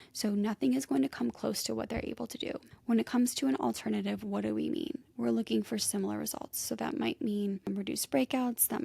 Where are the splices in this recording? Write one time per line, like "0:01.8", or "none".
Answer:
0:02.7